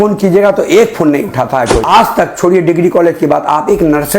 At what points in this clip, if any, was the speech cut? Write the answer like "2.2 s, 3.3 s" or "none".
1.8 s